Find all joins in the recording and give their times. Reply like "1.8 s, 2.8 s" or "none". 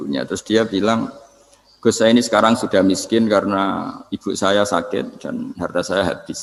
none